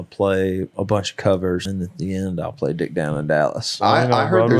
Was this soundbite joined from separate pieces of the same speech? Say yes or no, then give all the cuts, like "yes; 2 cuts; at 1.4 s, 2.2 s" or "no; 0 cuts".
yes; 2 cuts; at 1.7 s, 3.8 s